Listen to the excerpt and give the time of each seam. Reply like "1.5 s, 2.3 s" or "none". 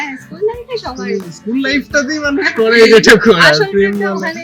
2.8 s